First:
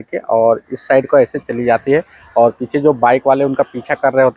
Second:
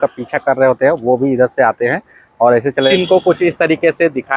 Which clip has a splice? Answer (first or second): second